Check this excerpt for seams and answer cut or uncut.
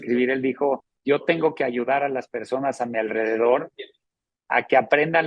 cut